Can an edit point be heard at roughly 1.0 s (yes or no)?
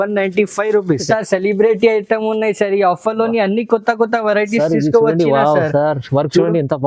yes